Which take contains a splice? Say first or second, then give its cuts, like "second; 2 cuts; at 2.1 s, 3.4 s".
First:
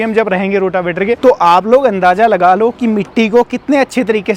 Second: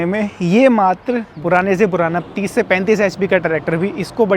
second; 1 cut; at 1.3 s